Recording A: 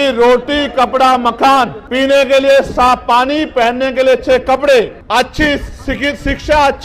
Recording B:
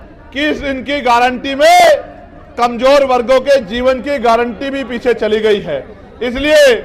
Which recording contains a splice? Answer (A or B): A